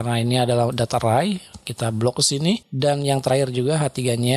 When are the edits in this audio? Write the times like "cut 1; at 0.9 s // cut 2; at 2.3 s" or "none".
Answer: cut 1; at 2.7 s